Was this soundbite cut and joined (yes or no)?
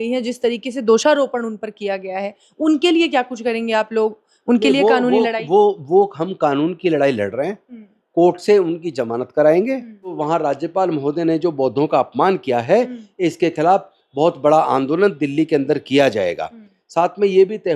yes